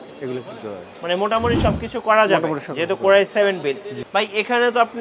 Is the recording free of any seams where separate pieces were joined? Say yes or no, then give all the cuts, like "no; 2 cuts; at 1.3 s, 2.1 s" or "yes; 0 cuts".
no; 1 cut; at 3.9 s